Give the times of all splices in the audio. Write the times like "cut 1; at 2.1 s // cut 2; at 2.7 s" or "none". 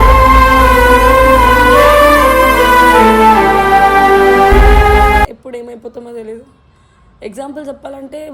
cut 1; at 5.4 s